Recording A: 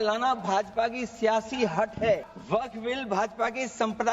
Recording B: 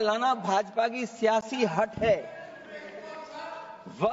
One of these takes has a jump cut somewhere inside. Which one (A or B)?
A